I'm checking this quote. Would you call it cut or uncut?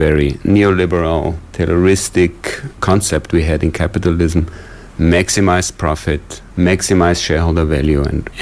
uncut